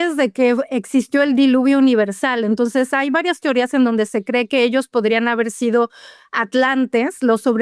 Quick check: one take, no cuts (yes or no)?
yes